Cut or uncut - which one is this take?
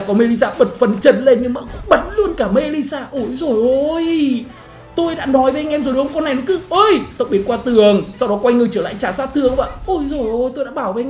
uncut